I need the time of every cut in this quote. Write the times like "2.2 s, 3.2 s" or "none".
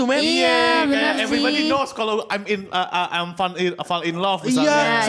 none